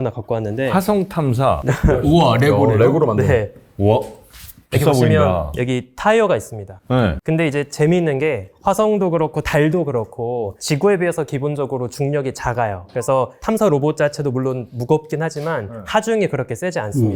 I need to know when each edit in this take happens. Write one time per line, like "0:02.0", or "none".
none